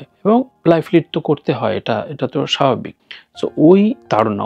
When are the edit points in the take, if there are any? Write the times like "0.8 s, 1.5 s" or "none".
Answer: none